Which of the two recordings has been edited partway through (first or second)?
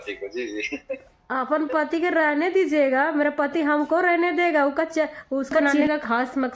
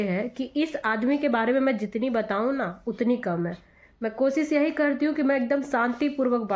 first